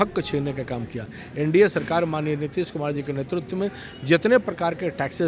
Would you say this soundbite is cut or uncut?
uncut